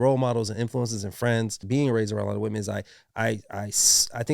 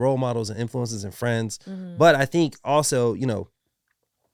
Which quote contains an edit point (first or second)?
first